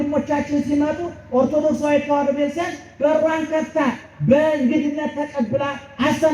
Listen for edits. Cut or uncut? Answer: uncut